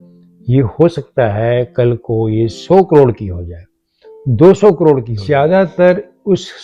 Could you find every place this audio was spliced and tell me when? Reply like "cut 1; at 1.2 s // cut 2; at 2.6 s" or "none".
cut 1; at 5.1 s